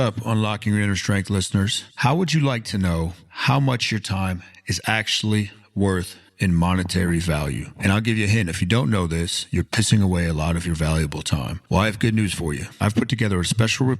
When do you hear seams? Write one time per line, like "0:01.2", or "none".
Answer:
0:06.2